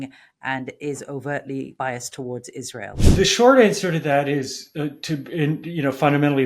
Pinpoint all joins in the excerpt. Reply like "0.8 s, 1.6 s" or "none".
1.7 s, 3.0 s

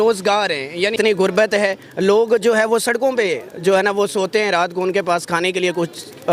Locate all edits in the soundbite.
0.9 s

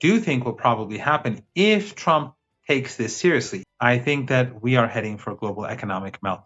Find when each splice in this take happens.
3.6 s

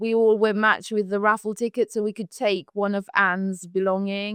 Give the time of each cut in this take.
none

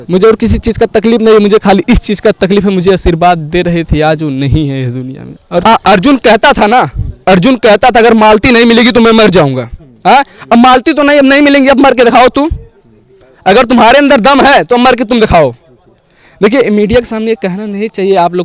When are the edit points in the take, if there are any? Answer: 5.6 s

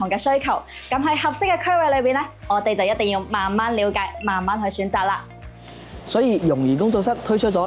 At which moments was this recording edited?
none

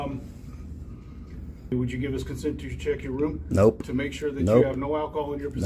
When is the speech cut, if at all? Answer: 1.7 s

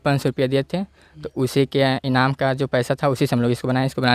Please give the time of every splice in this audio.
none

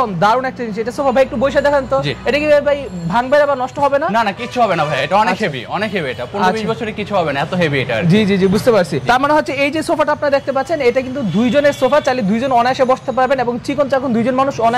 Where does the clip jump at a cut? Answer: none

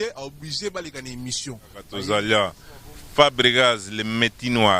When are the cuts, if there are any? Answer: 1.9 s

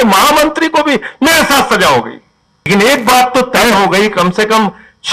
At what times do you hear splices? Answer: 2.7 s

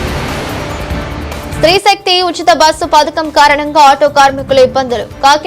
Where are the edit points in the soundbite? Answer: 1.5 s

